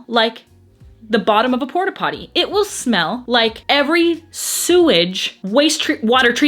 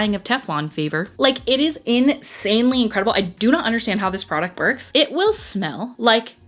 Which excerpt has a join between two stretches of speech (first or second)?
second